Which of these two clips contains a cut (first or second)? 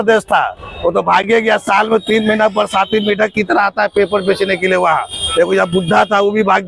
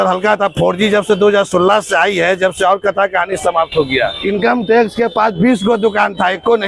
second